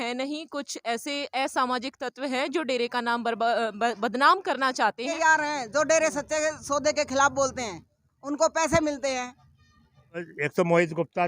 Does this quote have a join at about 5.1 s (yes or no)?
yes